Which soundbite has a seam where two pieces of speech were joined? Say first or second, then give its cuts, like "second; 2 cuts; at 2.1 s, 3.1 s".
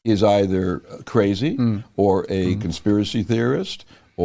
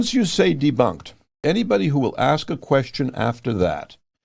second; 1 cut; at 1.3 s